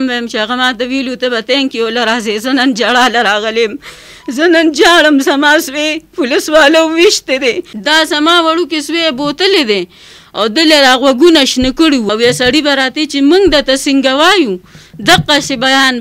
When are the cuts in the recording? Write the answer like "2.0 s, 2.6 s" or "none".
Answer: 7.7 s, 12.1 s